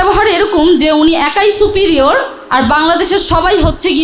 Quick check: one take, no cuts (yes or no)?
yes